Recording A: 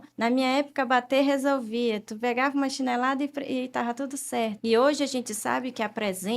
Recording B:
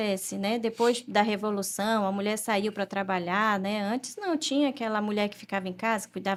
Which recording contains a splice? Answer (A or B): A